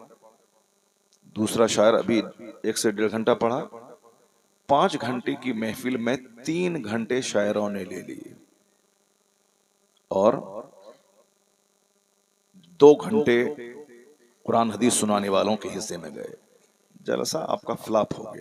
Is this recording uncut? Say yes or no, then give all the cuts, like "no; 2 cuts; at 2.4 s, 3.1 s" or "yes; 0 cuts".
yes; 0 cuts